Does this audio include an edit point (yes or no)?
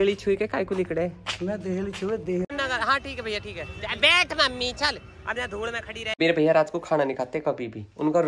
yes